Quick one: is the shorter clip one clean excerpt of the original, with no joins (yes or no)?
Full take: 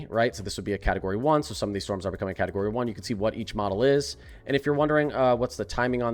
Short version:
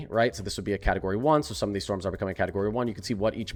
yes